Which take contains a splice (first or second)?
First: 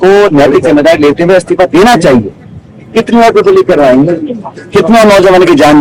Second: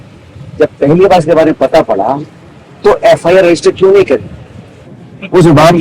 second